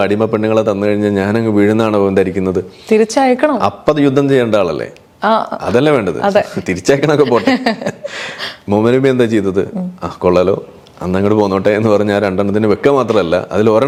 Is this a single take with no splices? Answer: yes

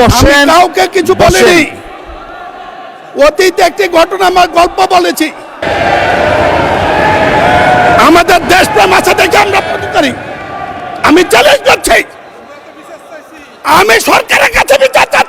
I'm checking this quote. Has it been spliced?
yes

